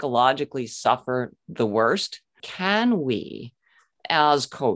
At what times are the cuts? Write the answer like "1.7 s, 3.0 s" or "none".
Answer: 2.5 s